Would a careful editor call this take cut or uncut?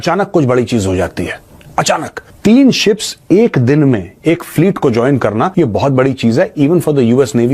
cut